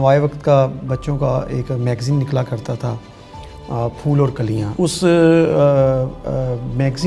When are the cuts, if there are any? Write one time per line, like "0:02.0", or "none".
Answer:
0:04.7